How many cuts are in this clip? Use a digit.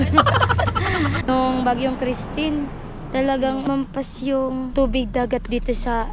1